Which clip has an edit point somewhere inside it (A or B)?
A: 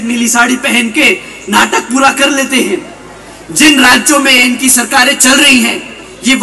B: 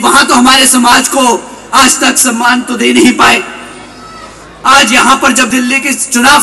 B